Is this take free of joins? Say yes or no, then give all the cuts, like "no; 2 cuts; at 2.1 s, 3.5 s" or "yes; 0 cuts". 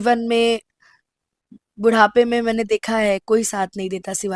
yes; 0 cuts